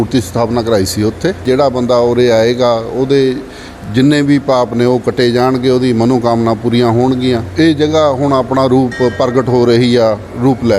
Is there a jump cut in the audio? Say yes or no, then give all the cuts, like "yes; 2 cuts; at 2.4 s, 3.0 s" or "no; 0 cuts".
yes; 2 cuts; at 1.4 s, 7.5 s